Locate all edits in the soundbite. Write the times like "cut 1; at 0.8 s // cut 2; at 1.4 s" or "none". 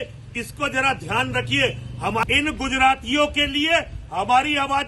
cut 1; at 2.2 s